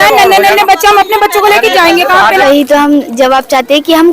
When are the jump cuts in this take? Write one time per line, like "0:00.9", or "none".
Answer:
0:02.4